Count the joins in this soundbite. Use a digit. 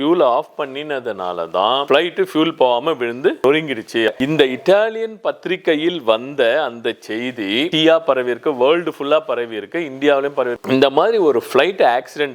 2